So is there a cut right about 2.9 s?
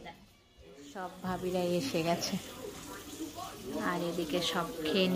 no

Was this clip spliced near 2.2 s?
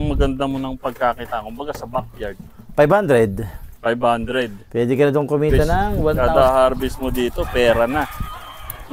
no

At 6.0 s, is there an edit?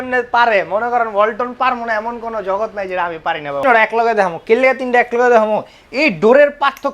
no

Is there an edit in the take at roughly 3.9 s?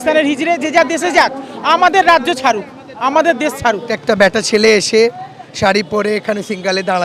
yes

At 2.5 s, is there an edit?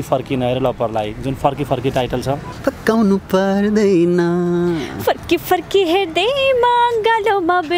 yes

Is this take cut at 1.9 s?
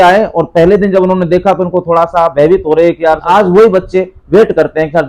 no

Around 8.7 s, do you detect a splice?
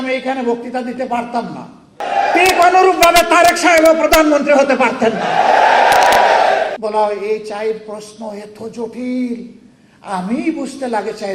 no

